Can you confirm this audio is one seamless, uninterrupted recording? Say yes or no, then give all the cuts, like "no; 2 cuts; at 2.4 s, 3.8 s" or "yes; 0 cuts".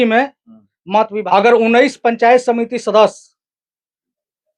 no; 1 cut; at 1.2 s